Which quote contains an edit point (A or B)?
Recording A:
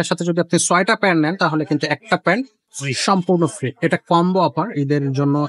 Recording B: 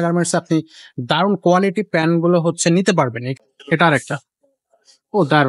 B